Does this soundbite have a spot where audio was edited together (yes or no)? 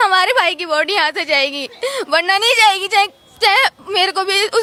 no